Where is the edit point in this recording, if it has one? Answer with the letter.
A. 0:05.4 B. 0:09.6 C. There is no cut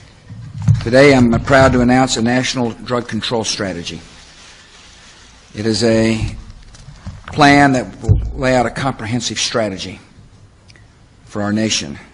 B